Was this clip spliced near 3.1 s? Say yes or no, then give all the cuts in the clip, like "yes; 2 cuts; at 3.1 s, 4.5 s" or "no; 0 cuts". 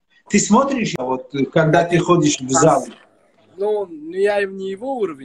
no; 1 cut; at 0.9 s